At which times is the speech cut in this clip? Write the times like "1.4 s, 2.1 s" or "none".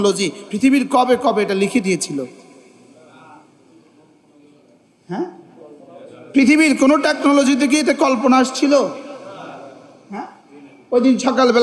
none